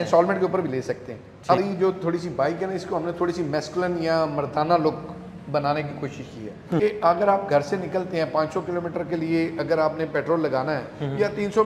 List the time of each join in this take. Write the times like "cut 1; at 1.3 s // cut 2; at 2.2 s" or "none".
cut 1; at 1.6 s // cut 2; at 6.8 s